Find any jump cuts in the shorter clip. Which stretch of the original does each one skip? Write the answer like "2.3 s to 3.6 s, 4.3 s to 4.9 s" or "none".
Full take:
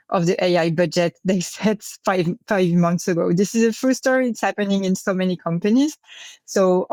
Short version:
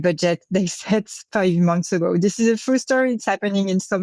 1.9 s to 2.4 s